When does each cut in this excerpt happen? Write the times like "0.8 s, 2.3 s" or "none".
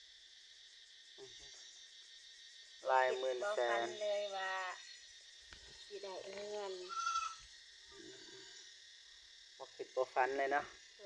none